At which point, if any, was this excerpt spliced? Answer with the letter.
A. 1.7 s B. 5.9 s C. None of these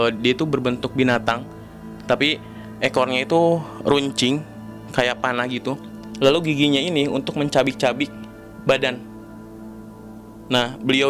B